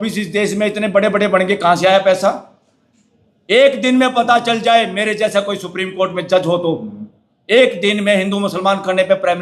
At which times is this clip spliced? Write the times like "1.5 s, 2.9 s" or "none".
none